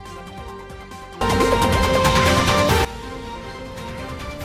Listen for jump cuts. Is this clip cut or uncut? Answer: cut